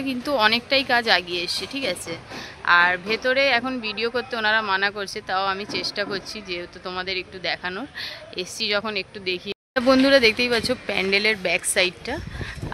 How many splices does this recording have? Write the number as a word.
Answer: one